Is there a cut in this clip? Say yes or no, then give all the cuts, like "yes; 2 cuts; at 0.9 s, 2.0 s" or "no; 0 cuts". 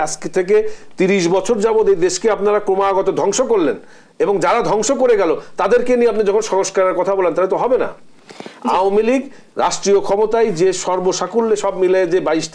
no; 0 cuts